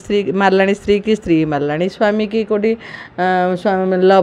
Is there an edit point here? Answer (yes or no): no